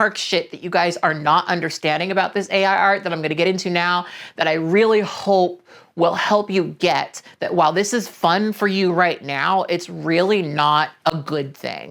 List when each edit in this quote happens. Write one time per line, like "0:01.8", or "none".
none